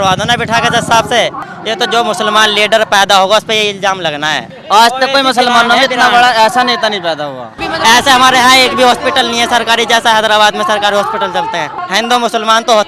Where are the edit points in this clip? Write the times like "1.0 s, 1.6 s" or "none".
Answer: 1.5 s, 4.5 s, 7.6 s, 11.7 s